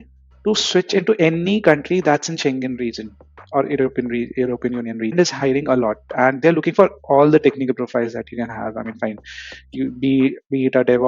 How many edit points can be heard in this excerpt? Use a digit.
1